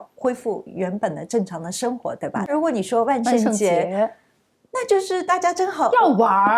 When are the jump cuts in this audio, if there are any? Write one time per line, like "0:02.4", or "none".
0:02.5

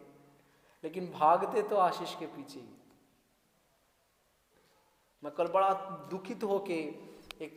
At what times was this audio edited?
none

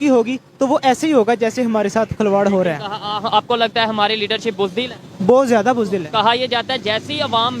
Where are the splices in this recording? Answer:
0:05.0

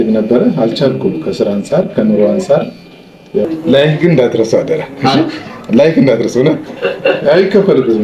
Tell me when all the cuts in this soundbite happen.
0:03.4

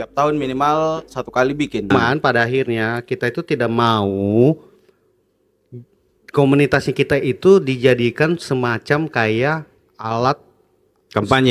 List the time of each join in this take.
0:01.9

